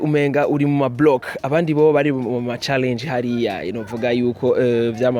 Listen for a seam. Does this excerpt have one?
no; 0 cuts

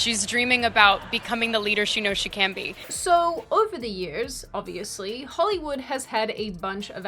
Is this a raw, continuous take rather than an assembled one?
no; 1 cut; at 2.7 s

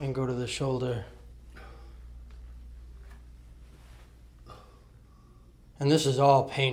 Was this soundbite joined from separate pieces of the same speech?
no; 0 cuts

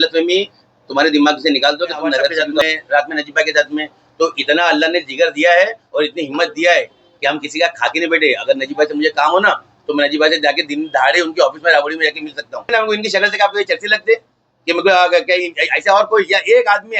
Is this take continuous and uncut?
no; 2 cuts; at 2.6 s, 12.7 s

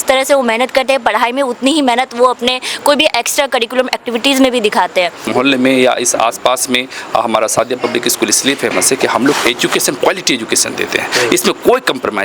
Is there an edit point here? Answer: yes; 1 cut; at 5.2 s

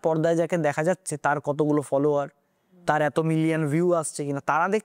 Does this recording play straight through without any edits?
yes; 0 cuts

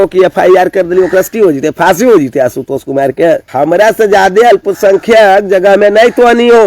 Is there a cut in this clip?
yes; 1 cut; at 3.5 s

